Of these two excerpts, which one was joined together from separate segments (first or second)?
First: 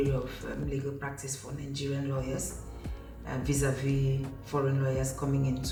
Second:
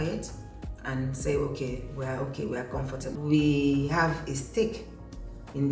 second